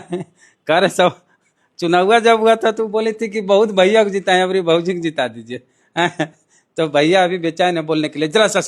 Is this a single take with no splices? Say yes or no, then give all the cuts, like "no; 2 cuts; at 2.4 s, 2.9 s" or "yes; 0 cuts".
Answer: yes; 0 cuts